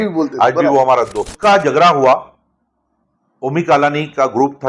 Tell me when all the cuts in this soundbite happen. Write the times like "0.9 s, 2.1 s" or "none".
1.3 s

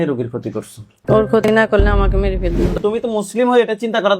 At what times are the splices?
2.7 s

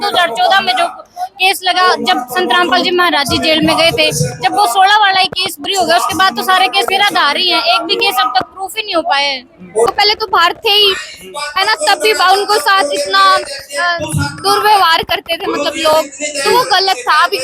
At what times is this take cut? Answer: 9.9 s

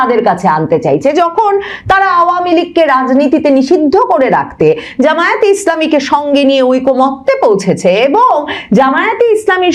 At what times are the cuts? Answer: none

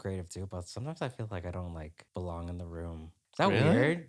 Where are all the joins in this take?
2.0 s, 3.1 s

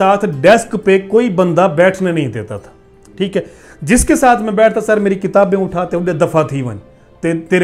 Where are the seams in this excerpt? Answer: none

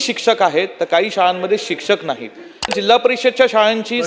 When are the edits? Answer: 2.7 s

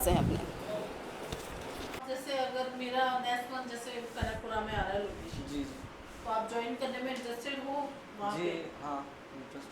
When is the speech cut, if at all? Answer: 2.0 s

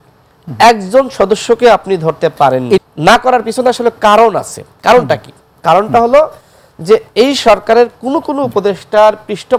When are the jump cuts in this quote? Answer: 2.9 s

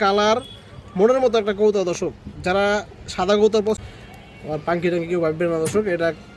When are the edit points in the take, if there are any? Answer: 3.8 s

